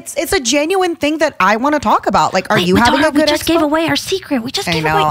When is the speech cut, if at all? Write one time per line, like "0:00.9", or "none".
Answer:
none